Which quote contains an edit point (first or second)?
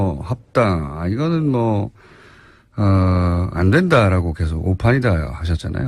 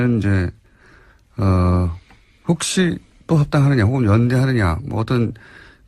first